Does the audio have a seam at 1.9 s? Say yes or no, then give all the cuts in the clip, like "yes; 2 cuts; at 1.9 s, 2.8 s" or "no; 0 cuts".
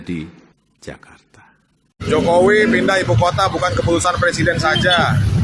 yes; 1 cut; at 1.9 s